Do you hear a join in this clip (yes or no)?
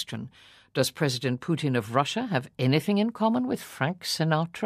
no